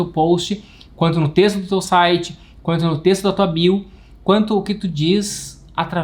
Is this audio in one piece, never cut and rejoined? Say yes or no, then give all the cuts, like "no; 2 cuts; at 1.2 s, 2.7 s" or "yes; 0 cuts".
yes; 0 cuts